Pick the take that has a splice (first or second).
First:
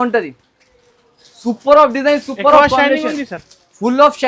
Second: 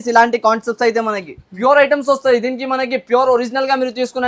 second